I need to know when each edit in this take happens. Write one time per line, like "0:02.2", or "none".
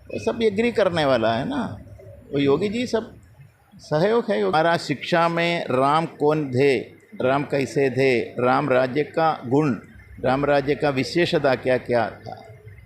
0:04.5